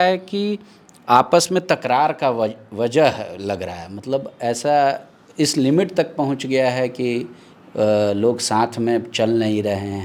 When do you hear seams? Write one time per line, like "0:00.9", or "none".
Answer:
none